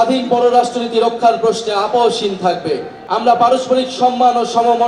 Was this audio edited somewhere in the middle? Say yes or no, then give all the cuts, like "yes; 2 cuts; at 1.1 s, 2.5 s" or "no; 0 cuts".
yes; 1 cut; at 2.9 s